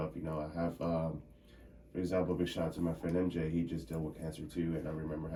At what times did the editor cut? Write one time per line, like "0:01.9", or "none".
none